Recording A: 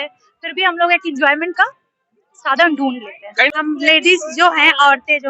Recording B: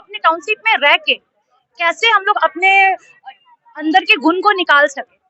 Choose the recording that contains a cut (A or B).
A